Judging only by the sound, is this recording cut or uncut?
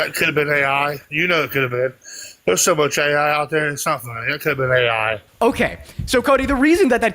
cut